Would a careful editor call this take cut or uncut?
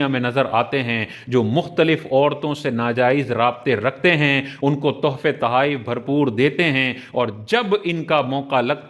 uncut